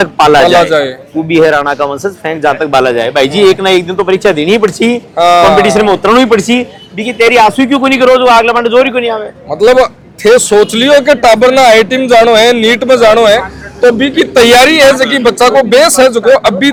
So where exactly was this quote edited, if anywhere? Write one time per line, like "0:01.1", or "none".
none